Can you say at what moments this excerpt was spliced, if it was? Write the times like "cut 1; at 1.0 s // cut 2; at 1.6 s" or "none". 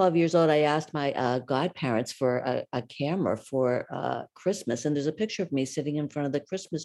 none